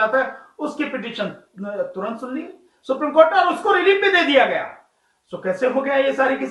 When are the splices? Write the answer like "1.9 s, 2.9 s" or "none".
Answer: none